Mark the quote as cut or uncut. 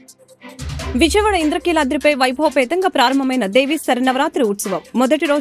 uncut